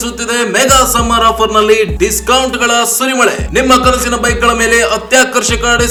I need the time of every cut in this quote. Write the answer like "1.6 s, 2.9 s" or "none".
none